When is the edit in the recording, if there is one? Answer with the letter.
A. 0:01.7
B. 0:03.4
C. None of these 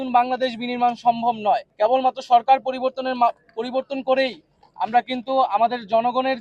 A